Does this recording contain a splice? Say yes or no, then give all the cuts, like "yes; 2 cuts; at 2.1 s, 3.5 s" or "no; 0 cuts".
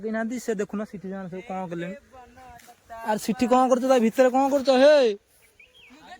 no; 0 cuts